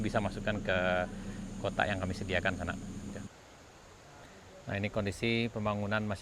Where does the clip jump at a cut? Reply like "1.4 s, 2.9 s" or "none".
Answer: 3.3 s